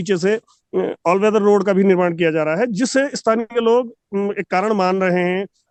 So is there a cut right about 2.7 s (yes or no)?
no